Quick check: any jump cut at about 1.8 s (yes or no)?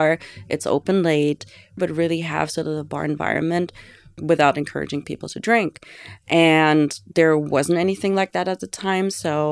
yes